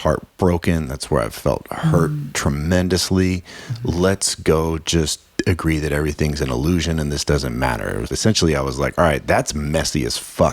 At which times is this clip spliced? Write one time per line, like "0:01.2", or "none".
0:08.1